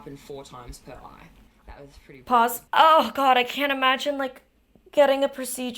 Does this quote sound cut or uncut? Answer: cut